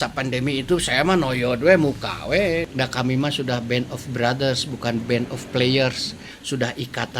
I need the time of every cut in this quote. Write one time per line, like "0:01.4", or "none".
0:02.7
0:06.3